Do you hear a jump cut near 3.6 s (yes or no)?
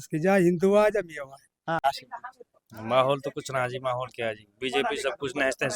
no